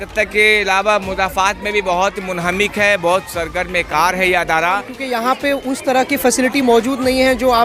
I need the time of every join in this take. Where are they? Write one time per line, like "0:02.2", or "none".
0:05.0